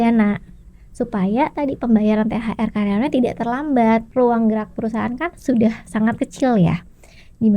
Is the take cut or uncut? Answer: cut